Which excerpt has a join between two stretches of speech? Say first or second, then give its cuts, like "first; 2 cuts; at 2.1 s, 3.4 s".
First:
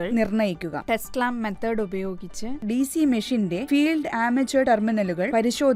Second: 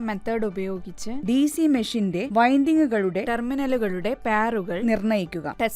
second; 1 cut; at 1.1 s